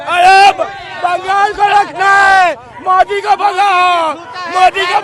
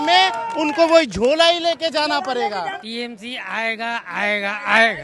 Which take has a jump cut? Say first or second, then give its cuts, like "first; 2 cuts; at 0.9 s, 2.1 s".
second; 1 cut; at 2.8 s